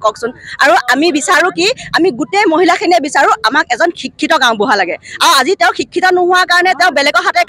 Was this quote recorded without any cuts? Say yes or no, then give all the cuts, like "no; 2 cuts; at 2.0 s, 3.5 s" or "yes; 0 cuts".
yes; 0 cuts